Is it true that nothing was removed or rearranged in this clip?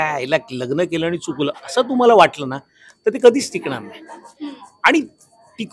yes; 0 cuts

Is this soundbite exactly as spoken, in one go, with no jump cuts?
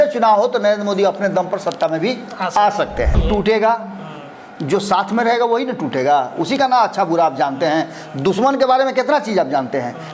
no; 1 cut; at 3.2 s

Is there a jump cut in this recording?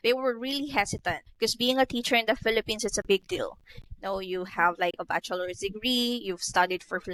no; 0 cuts

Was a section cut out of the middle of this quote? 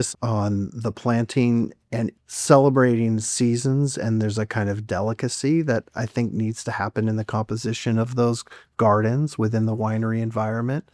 no; 0 cuts

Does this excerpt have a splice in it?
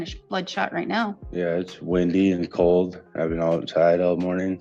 yes; 1 cut; at 1.2 s

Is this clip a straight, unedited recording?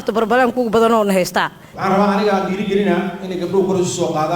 no; 1 cut; at 1.7 s

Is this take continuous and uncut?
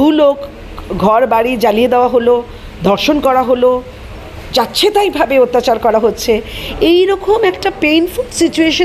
yes; 0 cuts

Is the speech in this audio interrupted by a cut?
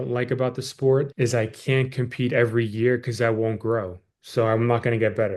no; 0 cuts

